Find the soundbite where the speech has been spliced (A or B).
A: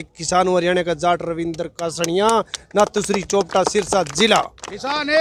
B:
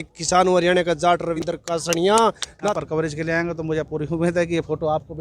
B